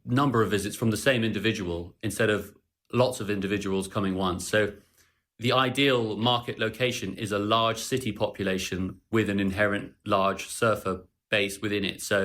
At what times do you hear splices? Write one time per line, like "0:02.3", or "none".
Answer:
0:11.1